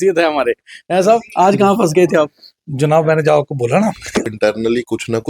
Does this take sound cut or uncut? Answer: cut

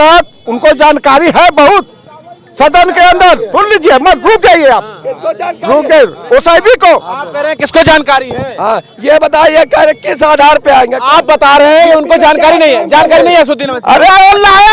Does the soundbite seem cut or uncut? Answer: uncut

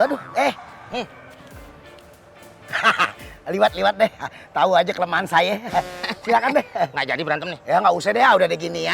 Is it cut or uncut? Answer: uncut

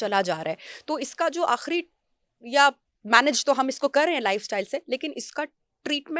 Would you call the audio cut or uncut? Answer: uncut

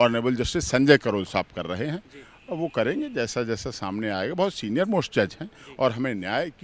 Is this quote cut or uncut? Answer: uncut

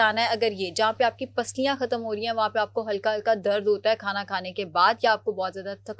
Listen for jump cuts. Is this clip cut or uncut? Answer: uncut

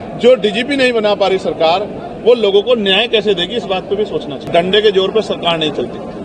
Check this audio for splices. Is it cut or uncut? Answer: cut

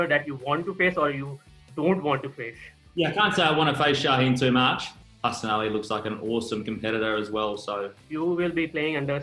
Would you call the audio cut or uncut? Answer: cut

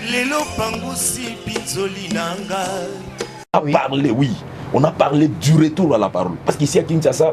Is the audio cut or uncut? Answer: cut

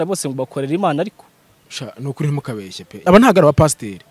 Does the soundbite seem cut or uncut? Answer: cut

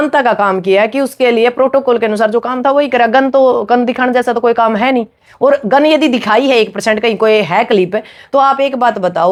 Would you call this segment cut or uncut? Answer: uncut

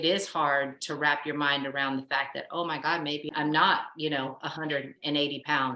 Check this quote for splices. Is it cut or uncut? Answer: cut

